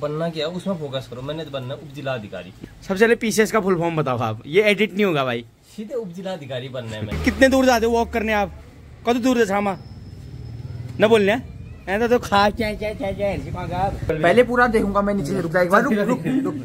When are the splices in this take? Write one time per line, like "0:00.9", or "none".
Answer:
0:02.5
0:07.1
0:14.1